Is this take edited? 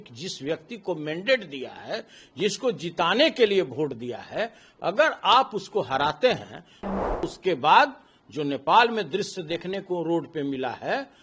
yes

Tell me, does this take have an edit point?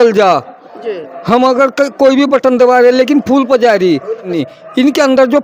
yes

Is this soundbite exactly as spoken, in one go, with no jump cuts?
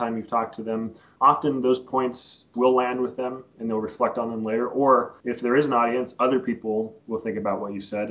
no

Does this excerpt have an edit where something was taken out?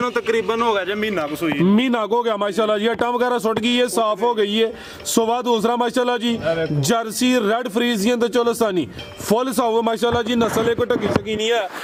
no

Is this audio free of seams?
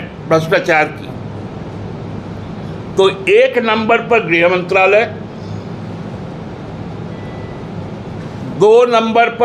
yes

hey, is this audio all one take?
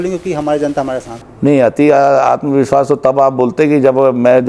yes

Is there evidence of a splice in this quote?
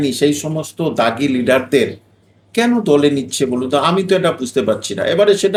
no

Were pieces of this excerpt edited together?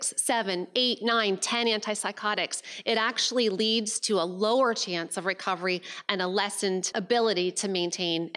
yes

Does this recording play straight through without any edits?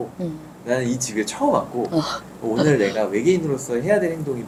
yes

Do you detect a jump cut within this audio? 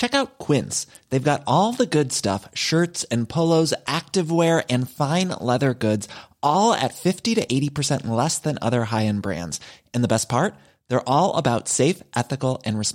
no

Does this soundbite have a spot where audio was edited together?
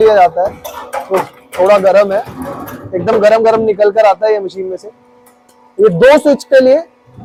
no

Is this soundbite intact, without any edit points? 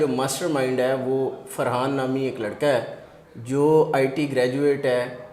yes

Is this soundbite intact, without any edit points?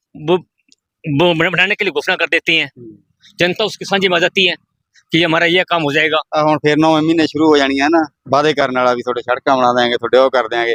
yes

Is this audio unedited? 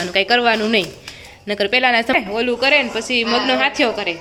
yes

